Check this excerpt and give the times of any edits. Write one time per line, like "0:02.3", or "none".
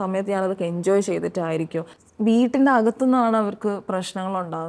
0:02.0